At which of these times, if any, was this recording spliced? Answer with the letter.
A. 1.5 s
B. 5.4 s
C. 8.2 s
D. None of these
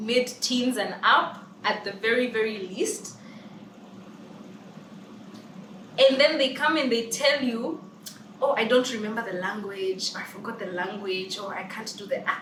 D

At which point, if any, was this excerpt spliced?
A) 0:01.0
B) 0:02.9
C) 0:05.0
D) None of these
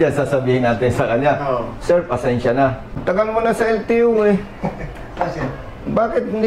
B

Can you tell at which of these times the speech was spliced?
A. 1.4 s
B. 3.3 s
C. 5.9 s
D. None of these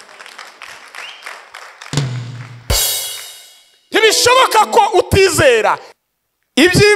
C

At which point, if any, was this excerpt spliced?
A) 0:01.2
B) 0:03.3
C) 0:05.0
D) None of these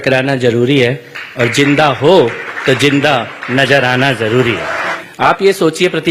C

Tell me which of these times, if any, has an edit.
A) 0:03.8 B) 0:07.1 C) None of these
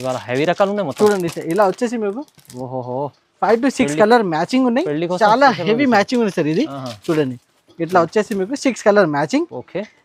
C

